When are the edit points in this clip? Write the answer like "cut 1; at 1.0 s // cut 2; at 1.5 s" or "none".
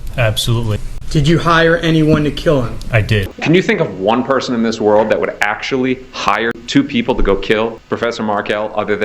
cut 1; at 0.9 s // cut 2; at 3.3 s // cut 3; at 6.6 s // cut 4; at 7.8 s